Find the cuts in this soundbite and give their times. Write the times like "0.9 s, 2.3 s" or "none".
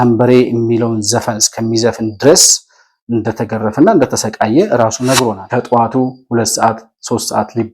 5.4 s

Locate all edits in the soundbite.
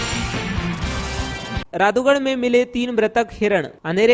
1.6 s

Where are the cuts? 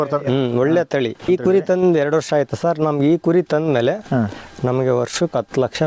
1.2 s

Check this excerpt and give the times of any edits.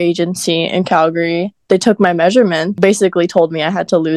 1.5 s, 2.8 s

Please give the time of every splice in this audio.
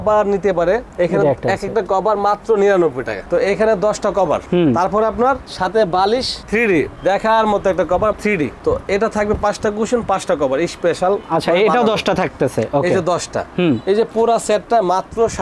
none

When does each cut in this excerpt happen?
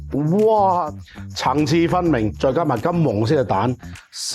0.9 s, 2.4 s

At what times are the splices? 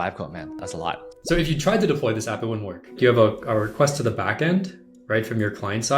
0.9 s, 3.0 s

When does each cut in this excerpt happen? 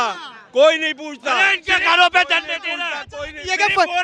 none

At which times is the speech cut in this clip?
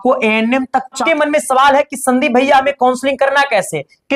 1.0 s

